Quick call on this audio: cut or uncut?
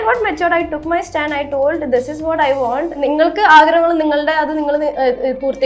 cut